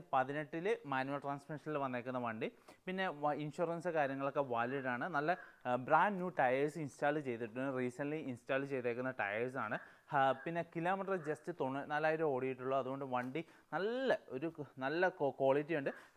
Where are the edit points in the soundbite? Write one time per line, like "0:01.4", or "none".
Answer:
none